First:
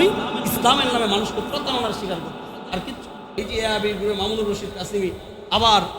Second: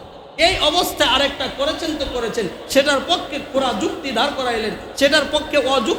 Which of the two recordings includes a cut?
first; 1 cut; at 3.4 s

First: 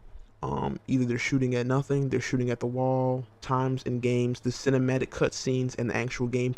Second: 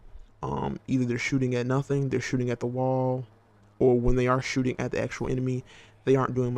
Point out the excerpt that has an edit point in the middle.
second; 1 cut; at 3.3 s

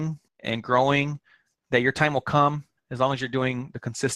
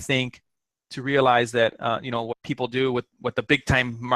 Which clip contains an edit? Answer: second; 1 cut; at 2.3 s

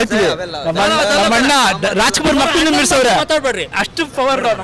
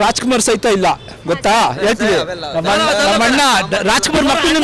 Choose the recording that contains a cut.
first; 1 cut; at 3.7 s

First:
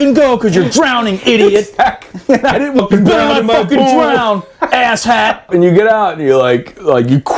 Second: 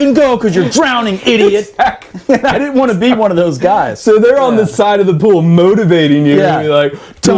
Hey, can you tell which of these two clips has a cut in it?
first; 2 cuts; at 2.8 s, 5.4 s

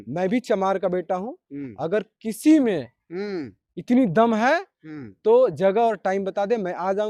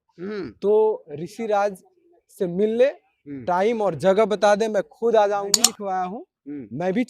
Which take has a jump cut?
second; 1 cut; at 5.7 s

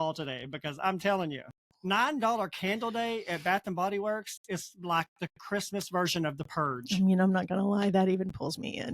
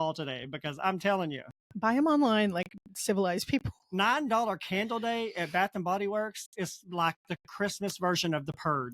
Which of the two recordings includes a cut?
first; 1 cut; at 1.7 s

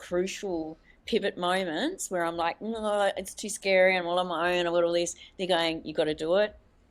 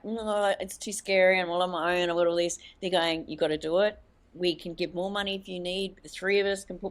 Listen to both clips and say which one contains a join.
first; 1 cut; at 1.0 s

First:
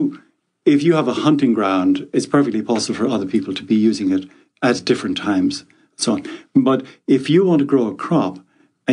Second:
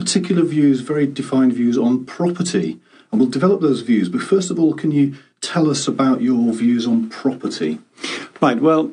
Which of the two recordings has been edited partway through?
second; 1 cut; at 2.8 s

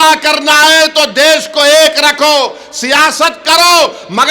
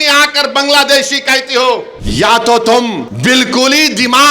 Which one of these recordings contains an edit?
second; 2 cuts; at 2.0 s, 3.1 s

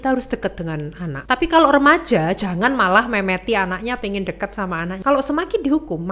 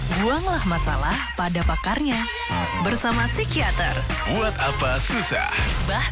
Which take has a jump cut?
first; 2 cuts; at 1.1 s, 5.0 s

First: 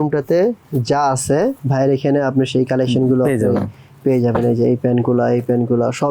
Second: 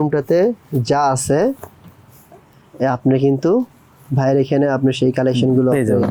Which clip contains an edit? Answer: first; 1 cut; at 1.6 s

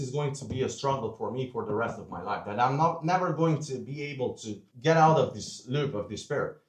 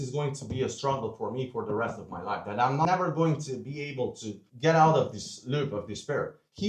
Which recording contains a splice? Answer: second; 1 cut; at 2.8 s

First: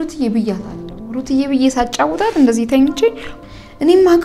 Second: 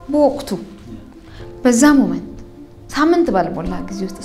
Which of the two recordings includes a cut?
first; 1 cut; at 3.3 s

